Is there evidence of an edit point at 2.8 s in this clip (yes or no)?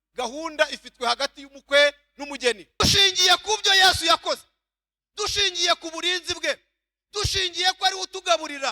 yes